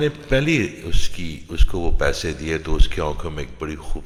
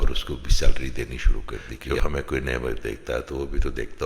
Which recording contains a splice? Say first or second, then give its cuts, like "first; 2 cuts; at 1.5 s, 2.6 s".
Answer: second; 1 cut; at 1.7 s